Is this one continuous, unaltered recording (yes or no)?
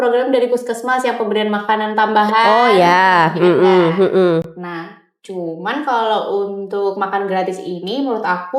yes